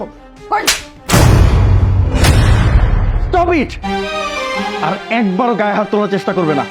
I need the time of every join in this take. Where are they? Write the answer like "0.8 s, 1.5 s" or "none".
none